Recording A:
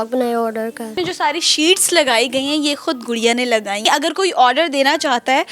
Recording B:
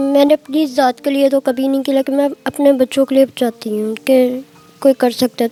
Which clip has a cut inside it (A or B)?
A